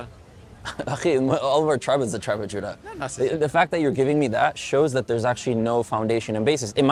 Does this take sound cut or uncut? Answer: uncut